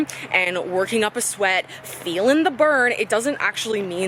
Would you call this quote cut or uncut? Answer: uncut